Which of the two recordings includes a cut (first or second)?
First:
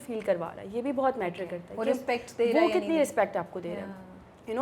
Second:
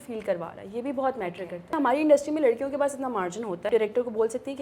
second